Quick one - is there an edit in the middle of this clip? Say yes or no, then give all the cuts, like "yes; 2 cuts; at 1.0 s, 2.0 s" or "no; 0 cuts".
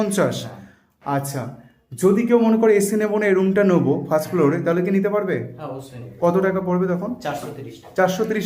no; 0 cuts